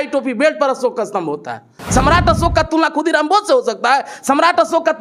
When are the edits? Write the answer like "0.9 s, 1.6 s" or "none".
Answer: 1.7 s